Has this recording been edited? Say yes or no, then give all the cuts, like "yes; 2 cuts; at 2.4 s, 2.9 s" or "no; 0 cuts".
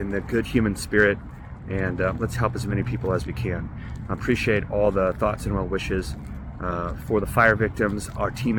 no; 0 cuts